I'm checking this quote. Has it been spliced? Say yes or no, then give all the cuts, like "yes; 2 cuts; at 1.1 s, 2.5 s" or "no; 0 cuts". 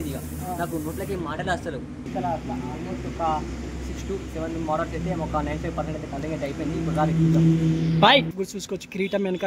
yes; 2 cuts; at 2.1 s, 8.4 s